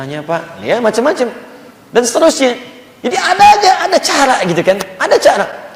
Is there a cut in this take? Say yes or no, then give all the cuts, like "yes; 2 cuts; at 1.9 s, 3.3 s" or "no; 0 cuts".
no; 0 cuts